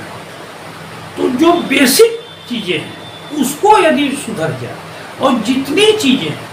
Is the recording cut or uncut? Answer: uncut